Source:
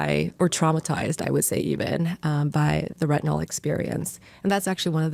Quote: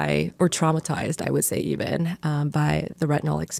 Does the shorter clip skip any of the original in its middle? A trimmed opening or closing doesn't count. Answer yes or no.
no